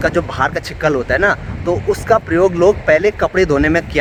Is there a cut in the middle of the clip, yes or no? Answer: no